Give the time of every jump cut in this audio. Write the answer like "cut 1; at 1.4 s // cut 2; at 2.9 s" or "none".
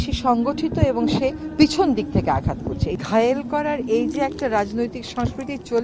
cut 1; at 2.9 s